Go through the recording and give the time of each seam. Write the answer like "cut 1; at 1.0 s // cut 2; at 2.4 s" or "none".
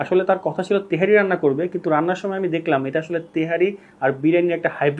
none